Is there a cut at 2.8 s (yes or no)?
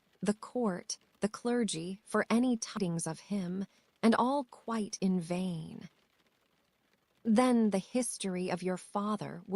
yes